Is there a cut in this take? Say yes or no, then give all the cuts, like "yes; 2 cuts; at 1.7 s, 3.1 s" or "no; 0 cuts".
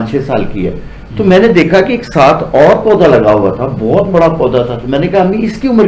no; 0 cuts